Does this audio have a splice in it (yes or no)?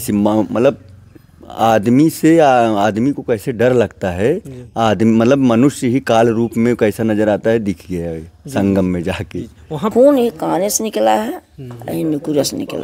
yes